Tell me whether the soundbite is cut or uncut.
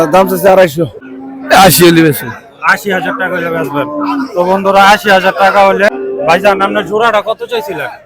cut